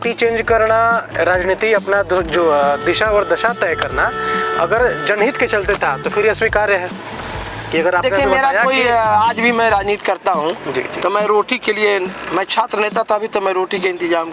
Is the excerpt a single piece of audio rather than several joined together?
yes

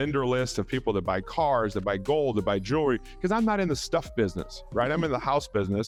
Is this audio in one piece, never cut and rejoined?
yes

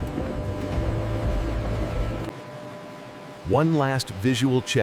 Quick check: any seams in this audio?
no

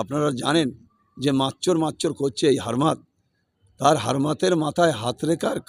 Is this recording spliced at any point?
no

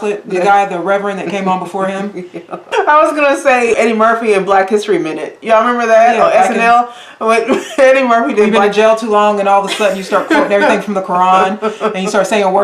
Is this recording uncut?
no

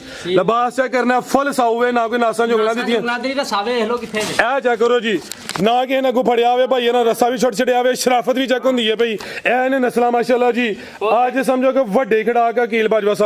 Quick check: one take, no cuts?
yes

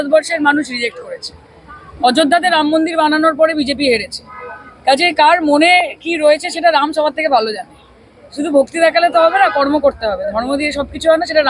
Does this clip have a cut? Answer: no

